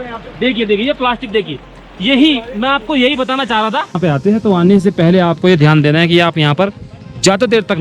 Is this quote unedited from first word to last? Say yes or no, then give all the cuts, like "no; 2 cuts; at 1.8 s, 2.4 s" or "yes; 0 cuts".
no; 1 cut; at 4.0 s